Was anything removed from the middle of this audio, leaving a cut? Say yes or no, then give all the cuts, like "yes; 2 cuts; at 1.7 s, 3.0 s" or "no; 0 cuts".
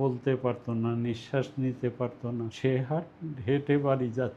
yes; 1 cut; at 2.5 s